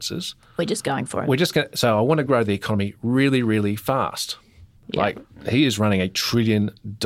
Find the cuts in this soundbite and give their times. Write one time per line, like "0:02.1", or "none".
0:04.8